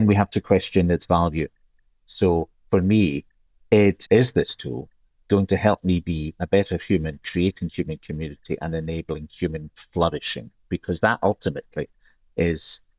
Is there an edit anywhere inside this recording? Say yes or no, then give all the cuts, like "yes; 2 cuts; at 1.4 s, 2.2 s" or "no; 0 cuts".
yes; 1 cut; at 4.0 s